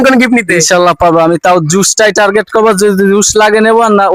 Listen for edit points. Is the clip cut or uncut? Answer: uncut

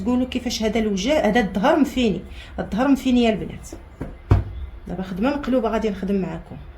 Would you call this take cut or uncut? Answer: uncut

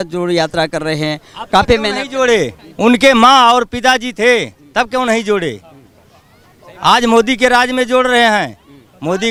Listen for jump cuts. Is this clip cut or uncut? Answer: uncut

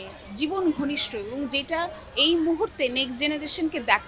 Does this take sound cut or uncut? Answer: uncut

